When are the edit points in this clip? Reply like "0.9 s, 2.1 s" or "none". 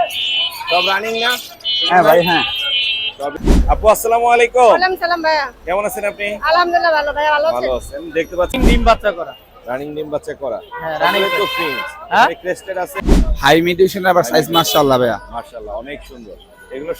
3.3 s, 8.6 s, 12.9 s